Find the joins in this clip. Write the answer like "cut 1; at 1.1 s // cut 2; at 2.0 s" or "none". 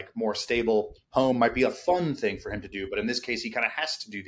none